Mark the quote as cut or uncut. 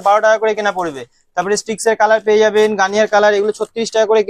uncut